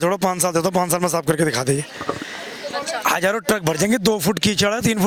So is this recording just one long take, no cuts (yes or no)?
yes